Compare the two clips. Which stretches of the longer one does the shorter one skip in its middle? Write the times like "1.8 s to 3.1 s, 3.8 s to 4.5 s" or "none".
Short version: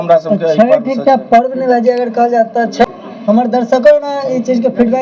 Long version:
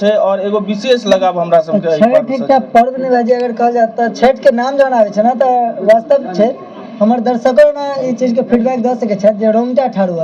4.3 s to 6.6 s